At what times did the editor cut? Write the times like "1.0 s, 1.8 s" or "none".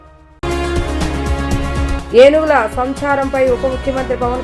1.8 s